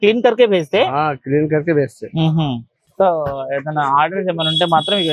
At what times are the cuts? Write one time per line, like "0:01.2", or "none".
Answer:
0:02.8